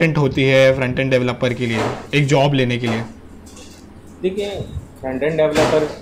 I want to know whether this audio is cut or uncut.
uncut